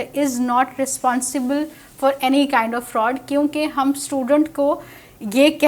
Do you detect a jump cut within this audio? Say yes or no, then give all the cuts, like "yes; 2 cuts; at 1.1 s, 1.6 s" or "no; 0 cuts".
no; 0 cuts